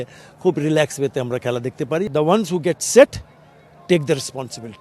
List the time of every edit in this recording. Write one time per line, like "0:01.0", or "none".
0:02.1